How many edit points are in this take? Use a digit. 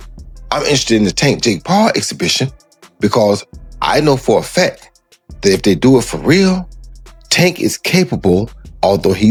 0